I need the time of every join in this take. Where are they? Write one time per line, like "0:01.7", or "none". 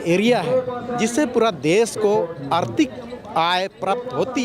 none

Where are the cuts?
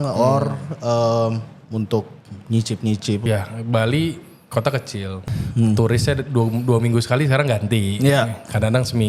0:03.2
0:05.2

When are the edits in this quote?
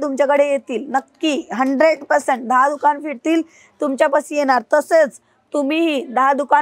none

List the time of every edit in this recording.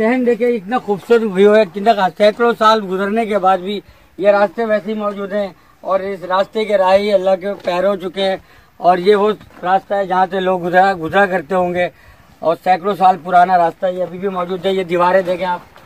none

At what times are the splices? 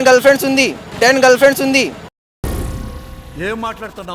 none

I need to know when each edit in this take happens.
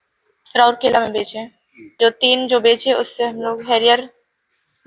0:01.9

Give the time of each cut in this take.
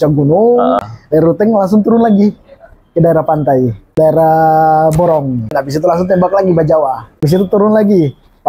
0:00.8
0:03.9
0:05.6
0:07.2

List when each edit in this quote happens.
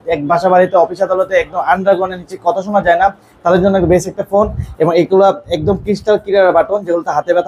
none

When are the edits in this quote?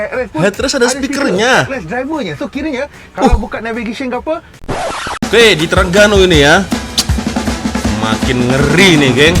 0:04.7

